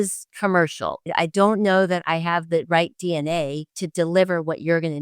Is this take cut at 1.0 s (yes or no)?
yes